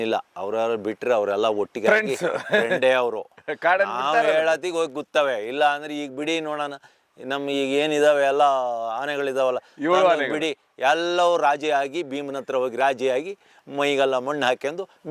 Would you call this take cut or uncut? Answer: uncut